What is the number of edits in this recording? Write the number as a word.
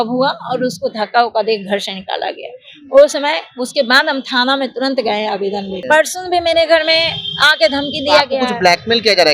one